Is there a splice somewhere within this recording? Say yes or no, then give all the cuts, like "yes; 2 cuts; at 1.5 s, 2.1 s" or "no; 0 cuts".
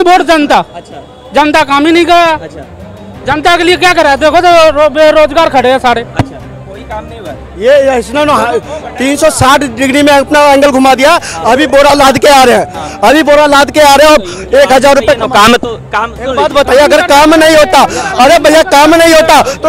no; 0 cuts